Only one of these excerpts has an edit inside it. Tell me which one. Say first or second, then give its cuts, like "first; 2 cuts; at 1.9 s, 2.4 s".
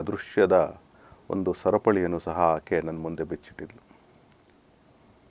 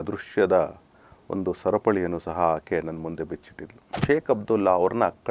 second; 1 cut; at 3.9 s